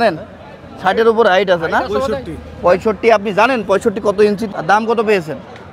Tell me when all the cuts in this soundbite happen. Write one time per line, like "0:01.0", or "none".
0:04.4